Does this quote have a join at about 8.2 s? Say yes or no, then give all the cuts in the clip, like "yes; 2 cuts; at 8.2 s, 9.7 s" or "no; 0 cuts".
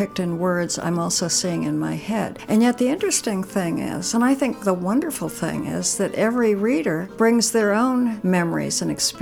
yes; 4 cuts; at 2.4 s, 4.6 s, 7.0 s, 8.2 s